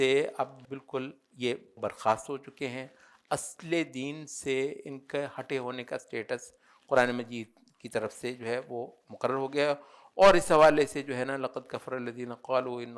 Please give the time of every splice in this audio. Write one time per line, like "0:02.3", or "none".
none